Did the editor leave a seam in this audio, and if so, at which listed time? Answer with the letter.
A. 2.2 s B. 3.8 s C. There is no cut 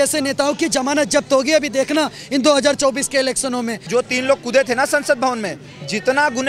B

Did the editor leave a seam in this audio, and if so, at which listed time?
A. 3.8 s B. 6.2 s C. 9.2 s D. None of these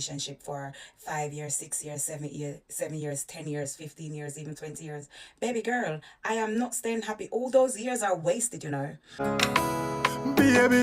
C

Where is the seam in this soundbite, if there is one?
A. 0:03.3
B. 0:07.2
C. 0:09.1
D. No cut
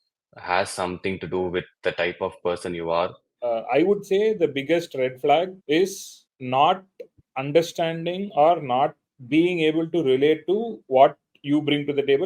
A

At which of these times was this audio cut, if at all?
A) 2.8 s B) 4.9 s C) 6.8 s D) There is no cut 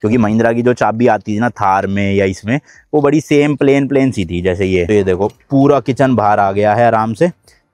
B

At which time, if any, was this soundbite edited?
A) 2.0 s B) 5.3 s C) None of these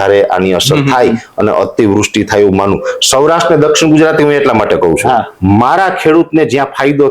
B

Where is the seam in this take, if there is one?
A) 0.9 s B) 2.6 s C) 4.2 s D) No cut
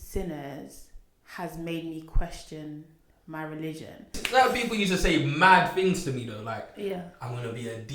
C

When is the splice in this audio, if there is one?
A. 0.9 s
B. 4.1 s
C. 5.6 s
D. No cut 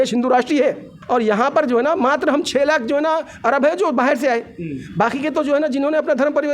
A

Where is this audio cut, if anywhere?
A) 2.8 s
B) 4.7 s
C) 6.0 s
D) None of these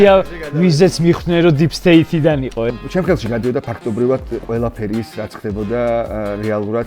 A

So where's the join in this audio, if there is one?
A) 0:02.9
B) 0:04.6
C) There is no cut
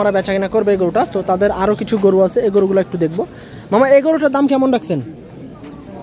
C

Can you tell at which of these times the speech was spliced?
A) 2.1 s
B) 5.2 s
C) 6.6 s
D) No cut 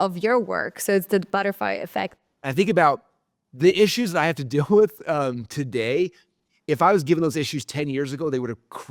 A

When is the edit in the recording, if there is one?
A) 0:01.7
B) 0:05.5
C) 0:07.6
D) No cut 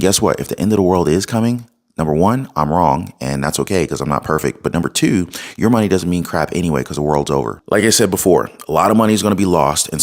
C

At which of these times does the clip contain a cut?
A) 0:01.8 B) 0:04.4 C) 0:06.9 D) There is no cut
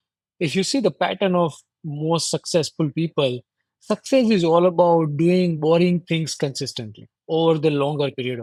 D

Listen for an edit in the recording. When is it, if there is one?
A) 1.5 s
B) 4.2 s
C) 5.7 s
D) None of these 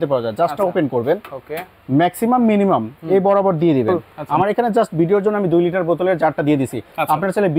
B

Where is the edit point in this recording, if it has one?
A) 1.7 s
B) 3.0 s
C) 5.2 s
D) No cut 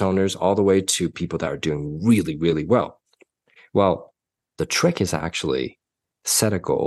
D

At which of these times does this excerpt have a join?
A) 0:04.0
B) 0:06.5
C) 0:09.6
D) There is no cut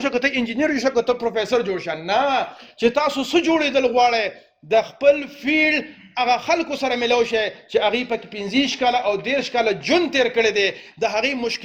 D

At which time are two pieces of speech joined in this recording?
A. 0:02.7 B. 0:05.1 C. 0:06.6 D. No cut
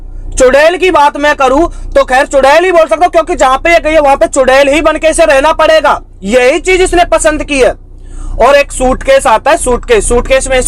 D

